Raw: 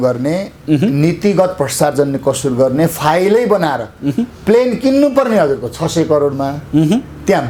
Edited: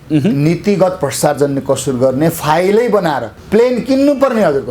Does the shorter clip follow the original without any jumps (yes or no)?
no